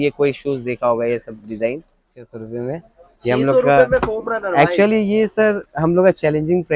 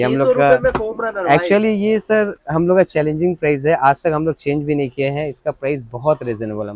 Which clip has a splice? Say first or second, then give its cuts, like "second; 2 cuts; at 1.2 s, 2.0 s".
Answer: first; 1 cut; at 2.3 s